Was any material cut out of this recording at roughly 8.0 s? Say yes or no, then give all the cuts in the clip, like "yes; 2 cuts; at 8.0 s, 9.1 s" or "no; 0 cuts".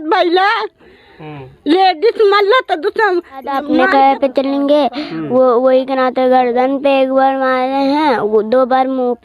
no; 1 cut; at 3.6 s